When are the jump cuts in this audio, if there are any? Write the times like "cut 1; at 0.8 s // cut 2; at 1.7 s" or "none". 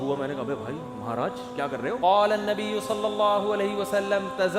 cut 1; at 2.0 s